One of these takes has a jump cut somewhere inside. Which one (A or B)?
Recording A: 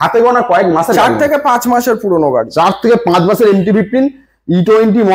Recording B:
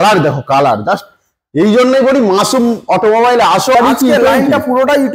B